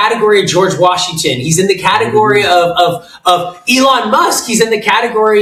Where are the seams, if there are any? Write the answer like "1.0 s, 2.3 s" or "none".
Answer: none